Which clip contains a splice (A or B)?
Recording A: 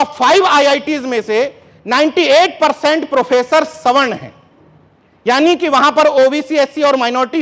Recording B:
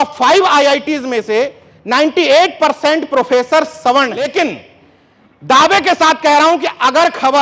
B